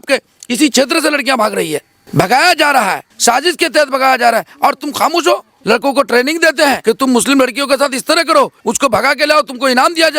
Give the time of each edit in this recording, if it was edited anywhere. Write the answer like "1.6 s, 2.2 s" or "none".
1.9 s, 3.0 s, 5.5 s, 6.8 s, 8.6 s